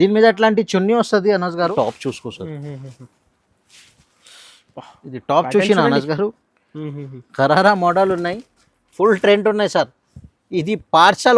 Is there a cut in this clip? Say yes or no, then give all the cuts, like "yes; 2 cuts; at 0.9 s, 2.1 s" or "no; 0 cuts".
yes; 1 cut; at 1.7 s